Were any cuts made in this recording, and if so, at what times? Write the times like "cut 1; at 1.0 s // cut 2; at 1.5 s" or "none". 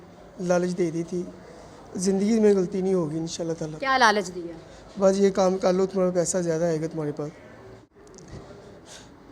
cut 1; at 7.8 s